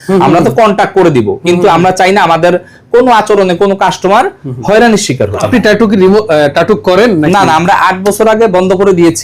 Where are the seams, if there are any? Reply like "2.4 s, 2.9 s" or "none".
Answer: 5.4 s